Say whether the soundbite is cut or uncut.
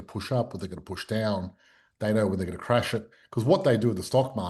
uncut